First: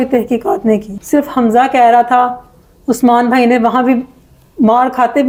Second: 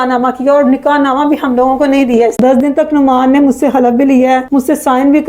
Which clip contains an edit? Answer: second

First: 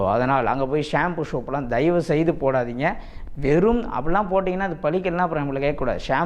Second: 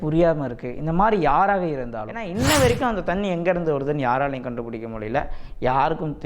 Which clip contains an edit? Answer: second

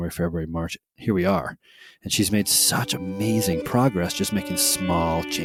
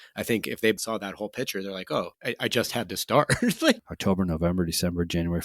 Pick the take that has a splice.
second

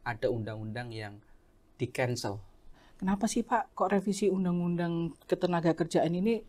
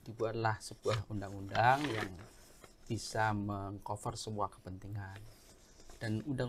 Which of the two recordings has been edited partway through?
first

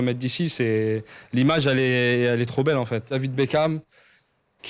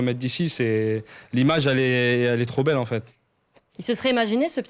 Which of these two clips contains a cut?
first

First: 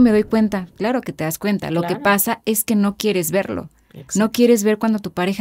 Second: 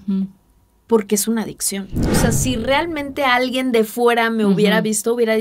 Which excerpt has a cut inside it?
second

